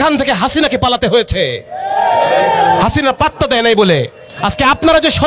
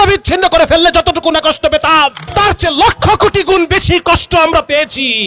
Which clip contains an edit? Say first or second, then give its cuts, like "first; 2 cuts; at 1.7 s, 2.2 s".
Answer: second; 1 cut; at 2.2 s